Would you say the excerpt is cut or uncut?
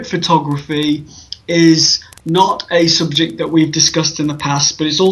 uncut